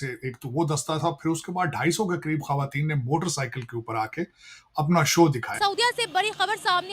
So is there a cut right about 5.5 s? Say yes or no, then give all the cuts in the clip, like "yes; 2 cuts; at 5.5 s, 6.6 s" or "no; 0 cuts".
yes; 1 cut; at 5.5 s